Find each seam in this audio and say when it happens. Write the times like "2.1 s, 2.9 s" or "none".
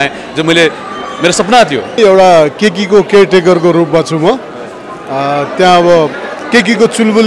2.0 s